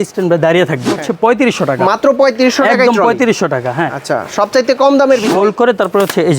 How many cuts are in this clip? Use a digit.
2